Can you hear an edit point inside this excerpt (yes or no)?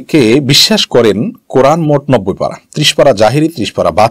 no